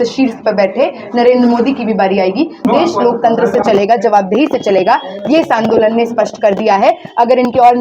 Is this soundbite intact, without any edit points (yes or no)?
no